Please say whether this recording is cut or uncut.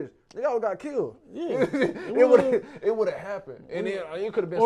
uncut